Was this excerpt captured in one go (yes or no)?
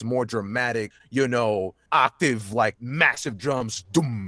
no